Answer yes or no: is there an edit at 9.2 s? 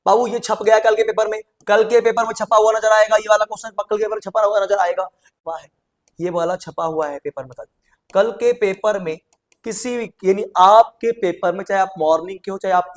no